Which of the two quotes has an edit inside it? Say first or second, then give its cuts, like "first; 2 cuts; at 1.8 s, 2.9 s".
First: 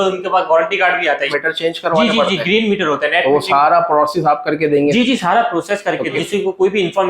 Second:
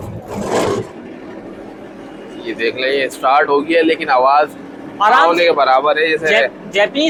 first; 2 cuts; at 1.3 s, 6.2 s